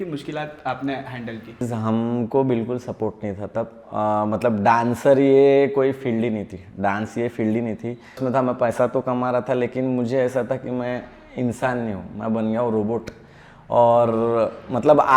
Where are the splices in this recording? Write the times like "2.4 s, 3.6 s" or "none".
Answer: 1.7 s, 8.2 s